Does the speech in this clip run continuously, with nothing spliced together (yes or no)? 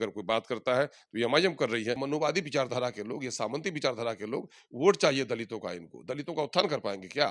no